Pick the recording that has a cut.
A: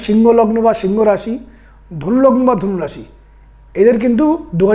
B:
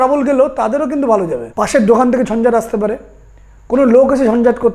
B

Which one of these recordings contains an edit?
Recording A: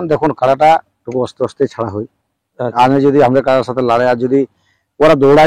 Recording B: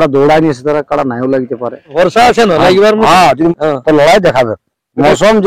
B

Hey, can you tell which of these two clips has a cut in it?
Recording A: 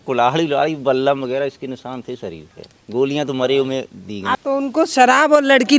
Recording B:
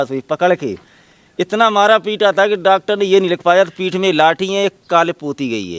A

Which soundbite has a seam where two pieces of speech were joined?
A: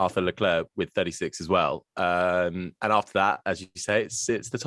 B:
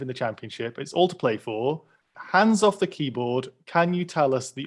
B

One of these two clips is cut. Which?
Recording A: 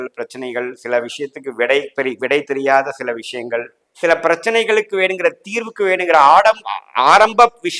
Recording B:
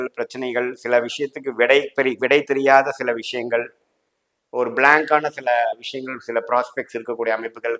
A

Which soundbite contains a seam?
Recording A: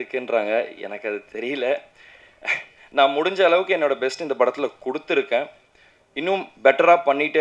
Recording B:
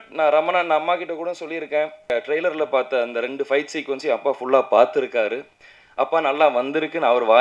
B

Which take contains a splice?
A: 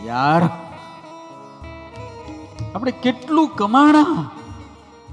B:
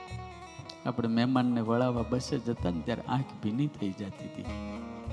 A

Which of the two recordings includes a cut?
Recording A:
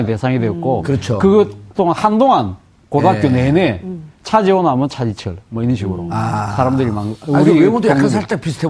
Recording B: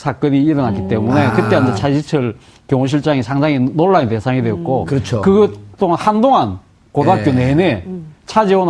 B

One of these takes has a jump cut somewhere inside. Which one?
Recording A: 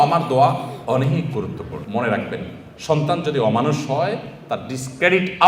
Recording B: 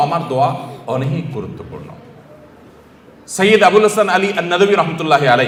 A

